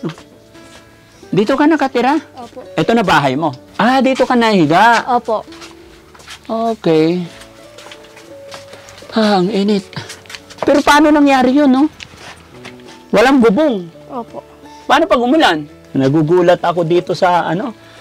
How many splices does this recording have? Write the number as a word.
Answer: two